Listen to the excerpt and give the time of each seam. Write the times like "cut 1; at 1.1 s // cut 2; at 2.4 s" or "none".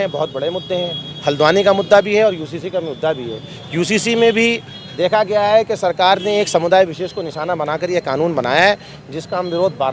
none